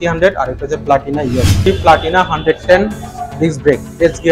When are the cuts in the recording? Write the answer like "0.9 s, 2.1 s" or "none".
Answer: 1.6 s